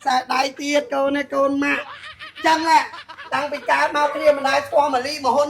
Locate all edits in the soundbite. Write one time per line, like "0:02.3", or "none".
none